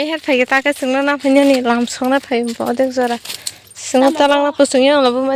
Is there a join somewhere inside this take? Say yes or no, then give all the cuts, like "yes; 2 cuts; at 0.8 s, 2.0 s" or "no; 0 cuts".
no; 0 cuts